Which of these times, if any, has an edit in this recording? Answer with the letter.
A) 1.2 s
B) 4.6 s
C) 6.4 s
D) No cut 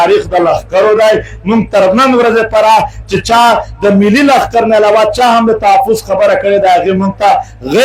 D